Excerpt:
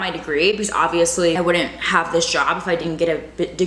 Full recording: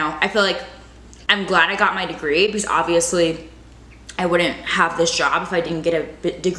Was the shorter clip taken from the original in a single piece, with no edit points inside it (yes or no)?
no